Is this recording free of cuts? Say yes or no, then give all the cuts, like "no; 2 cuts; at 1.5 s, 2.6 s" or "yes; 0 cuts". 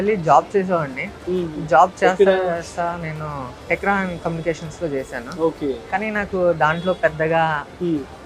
yes; 0 cuts